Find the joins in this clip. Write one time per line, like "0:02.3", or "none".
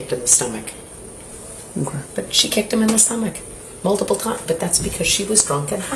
none